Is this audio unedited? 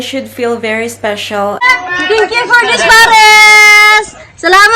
no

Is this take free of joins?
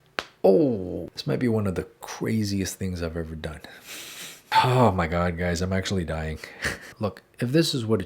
no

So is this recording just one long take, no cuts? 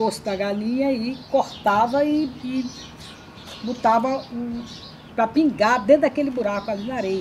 yes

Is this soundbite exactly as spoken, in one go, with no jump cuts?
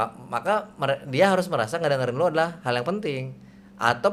yes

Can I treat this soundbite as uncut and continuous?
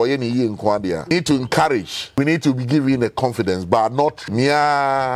no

